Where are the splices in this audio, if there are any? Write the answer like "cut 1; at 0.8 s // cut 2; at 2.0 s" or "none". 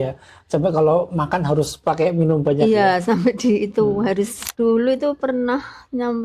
cut 1; at 4.4 s